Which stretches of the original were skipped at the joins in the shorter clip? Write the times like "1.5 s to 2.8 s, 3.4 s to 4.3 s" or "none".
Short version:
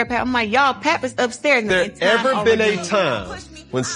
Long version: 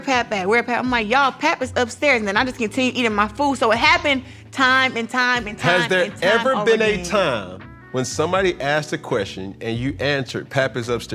2.2 s to 5.9 s

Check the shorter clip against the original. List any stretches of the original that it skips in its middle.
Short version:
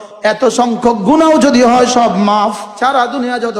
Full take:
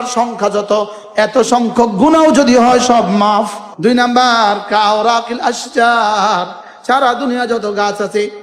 3.6 s to 6.7 s

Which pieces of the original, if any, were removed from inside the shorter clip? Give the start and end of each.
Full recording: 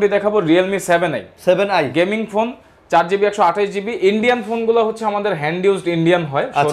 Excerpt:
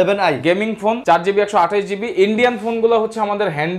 2.5 s to 2.8 s

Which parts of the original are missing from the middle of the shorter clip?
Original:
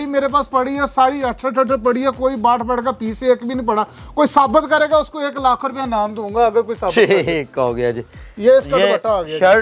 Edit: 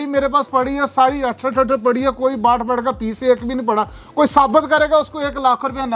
none

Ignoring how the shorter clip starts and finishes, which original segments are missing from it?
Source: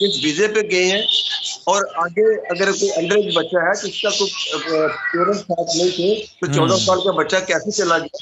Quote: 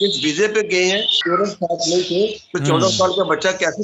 1.1 s to 5.0 s

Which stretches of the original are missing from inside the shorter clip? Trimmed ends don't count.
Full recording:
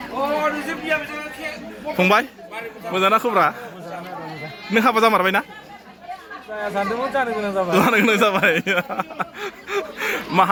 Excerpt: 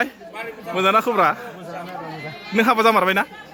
none

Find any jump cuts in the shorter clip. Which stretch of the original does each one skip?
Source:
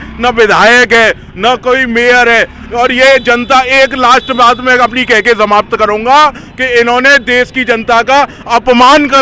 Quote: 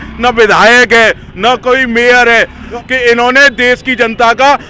2.7 s to 6.4 s

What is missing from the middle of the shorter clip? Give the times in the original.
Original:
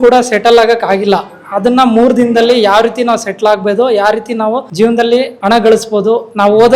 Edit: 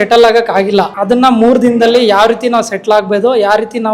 1.3 s to 1.5 s

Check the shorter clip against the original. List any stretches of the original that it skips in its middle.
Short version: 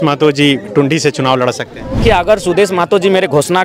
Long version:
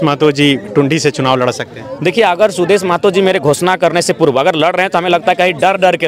2.0 s to 2.1 s

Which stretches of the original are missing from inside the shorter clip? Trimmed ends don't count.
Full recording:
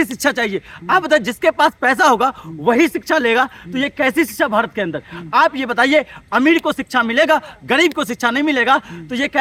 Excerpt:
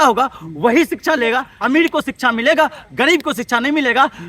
3.5 s to 6.2 s

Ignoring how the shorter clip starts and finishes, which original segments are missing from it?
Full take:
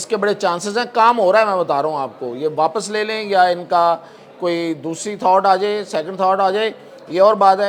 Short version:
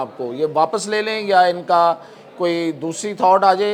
none

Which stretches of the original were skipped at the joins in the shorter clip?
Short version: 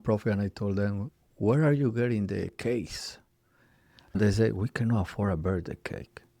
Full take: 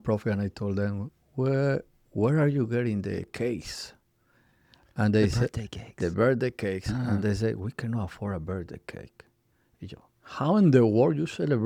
1.2 s to 2.0 s, 4.9 s to 7.2 s

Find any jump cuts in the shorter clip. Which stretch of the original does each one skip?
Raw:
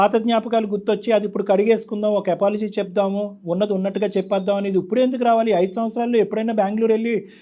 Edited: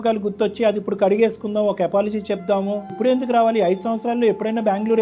3.4 s to 4.9 s

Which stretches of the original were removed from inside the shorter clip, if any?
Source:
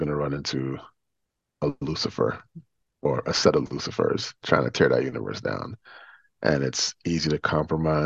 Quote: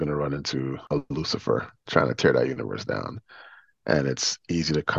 0.8 s to 1.5 s, 2.5 s to 4.3 s

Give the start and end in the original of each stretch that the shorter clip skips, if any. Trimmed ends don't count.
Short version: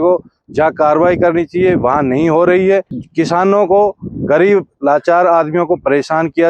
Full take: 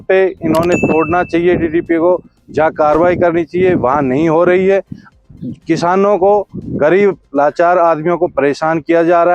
5.0 s to 5.5 s

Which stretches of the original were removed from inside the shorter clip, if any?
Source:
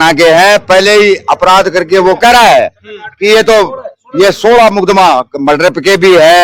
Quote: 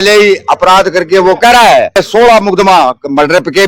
2.8 s to 4.3 s

